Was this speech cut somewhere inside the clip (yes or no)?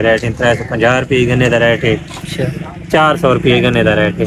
no